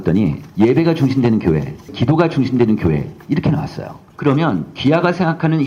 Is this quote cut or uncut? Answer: cut